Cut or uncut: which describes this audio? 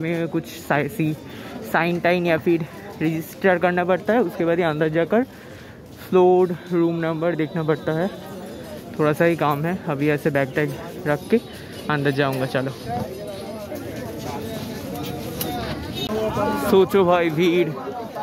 cut